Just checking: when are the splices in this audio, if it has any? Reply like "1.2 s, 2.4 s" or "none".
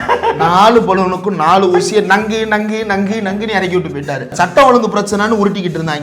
4.3 s